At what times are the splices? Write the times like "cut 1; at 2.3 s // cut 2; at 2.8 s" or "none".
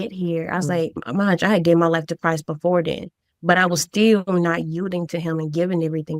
cut 1; at 1.0 s